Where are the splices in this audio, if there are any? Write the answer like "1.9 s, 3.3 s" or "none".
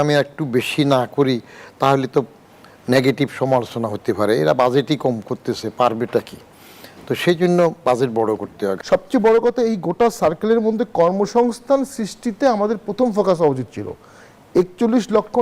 8.8 s